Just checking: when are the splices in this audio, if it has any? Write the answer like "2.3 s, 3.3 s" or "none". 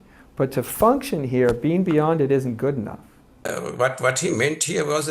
3.4 s